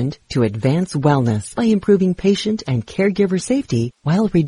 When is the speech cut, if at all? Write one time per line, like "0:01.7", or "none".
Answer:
0:01.5